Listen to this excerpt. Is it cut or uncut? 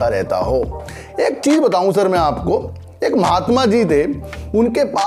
uncut